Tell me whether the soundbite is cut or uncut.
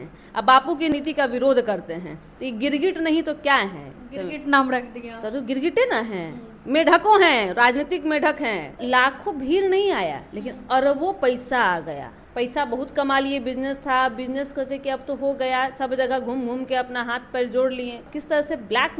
cut